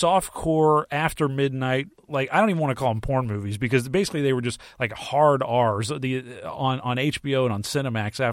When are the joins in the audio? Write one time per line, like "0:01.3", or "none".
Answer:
0:02.0